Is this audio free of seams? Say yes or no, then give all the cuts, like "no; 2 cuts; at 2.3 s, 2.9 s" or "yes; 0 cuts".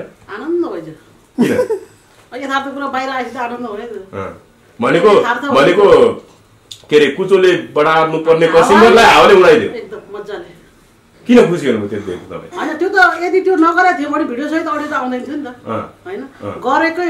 yes; 0 cuts